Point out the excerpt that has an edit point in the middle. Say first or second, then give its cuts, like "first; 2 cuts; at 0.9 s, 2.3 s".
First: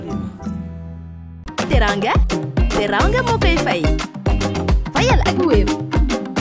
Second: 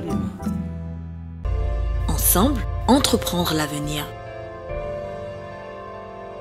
second; 1 cut; at 1.5 s